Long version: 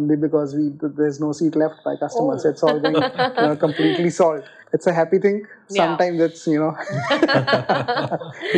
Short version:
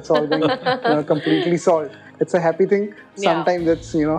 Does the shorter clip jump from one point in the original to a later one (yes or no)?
no